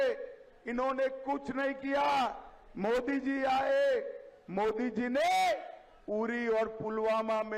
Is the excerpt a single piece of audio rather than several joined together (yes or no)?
yes